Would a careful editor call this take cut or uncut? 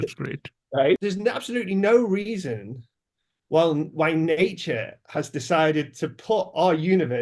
cut